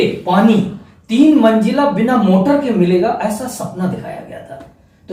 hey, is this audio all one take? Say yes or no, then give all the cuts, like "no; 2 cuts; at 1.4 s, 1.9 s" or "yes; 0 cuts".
yes; 0 cuts